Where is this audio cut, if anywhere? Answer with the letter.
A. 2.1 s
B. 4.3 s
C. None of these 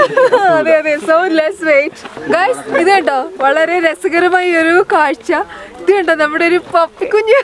A